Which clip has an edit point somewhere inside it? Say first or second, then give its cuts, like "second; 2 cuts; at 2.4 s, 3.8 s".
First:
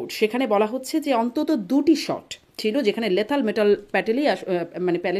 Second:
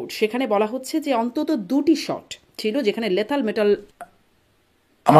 second; 1 cut; at 3.9 s